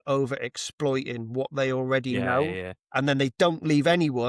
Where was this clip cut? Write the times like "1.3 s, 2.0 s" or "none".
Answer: none